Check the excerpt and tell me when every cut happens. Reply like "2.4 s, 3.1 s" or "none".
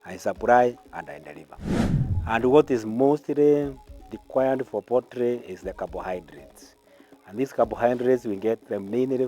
1.9 s